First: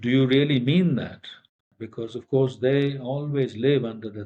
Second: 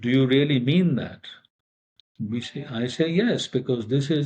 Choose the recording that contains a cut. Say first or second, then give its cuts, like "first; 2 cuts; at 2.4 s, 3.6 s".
first; 1 cut; at 1.8 s